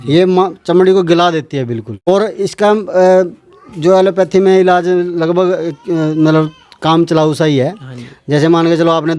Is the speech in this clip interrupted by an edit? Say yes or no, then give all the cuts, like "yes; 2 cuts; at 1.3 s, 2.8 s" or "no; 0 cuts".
yes; 1 cut; at 2.1 s